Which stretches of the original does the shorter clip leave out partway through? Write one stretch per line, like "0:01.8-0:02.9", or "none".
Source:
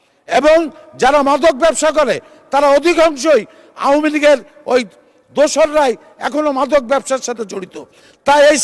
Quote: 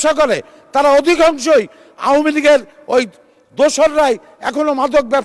none